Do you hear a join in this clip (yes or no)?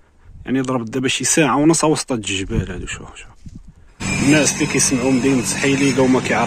yes